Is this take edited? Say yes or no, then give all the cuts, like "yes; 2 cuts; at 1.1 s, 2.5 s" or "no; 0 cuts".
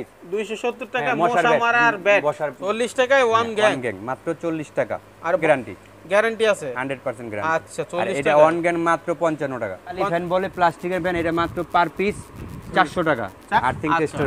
yes; 4 cuts; at 2.5 s, 5.4 s, 10.0 s, 13.4 s